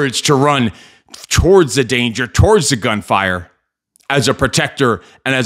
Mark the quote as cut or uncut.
uncut